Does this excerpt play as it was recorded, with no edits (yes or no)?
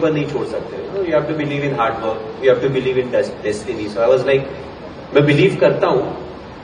yes